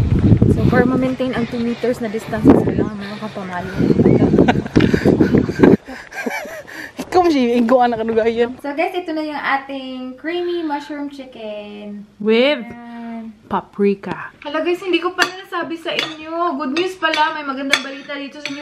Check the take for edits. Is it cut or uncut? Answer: cut